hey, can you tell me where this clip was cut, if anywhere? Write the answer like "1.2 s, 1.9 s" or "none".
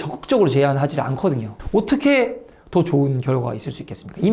1.5 s